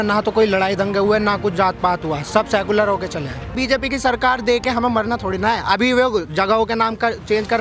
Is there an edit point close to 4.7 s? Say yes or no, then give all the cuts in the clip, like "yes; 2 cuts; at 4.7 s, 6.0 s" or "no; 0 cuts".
no; 1 cut; at 3.5 s